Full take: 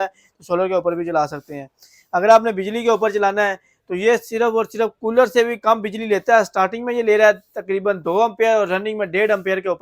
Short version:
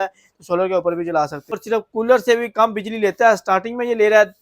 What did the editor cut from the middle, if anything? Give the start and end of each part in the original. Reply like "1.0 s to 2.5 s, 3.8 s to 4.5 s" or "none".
1.6 s to 4.7 s